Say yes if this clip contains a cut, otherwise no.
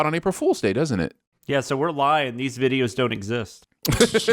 yes